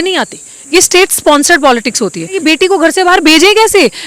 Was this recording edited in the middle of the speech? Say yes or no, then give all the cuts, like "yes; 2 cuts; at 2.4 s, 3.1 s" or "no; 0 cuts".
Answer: yes; 1 cut; at 2.4 s